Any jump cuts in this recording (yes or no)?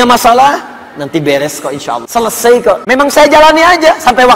yes